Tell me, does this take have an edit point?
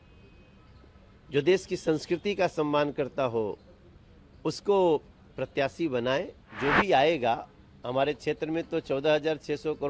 yes; 1 cut; at 6.4 s

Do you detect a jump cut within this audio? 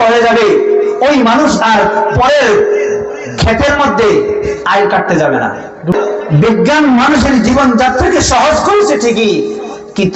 yes; 1 cut; at 6.0 s

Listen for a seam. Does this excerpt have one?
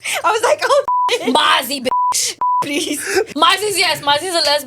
yes; 1 cut; at 3.3 s

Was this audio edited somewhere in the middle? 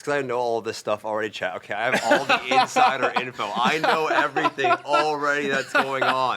no; 0 cuts

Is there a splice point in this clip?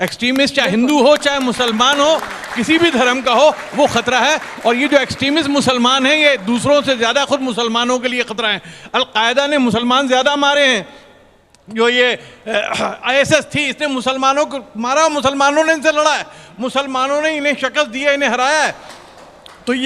no; 0 cuts

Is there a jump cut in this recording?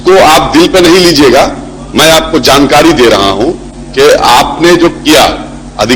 no; 0 cuts

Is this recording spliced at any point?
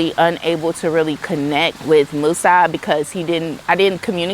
yes; 1 cut; at 1.8 s

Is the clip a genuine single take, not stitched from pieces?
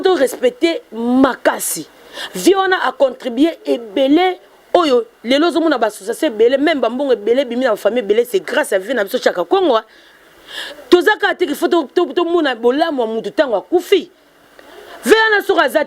yes; 0 cuts

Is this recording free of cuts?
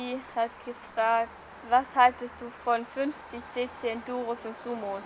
no; 1 cut; at 3.5 s

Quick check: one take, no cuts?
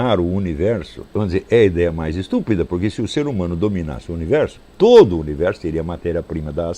no; 1 cut; at 1.0 s

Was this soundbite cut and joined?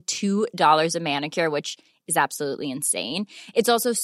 no; 0 cuts

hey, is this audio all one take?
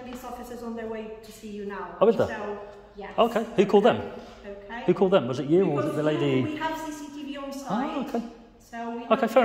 yes; 0 cuts

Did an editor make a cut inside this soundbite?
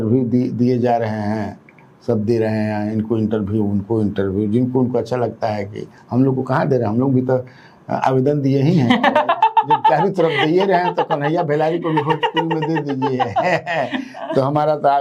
no; 0 cuts

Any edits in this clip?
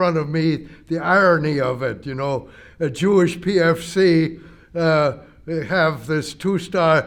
no; 0 cuts

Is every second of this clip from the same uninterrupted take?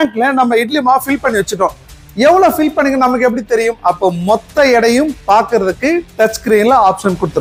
yes; 0 cuts

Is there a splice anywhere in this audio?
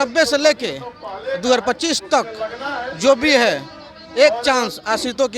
no; 0 cuts

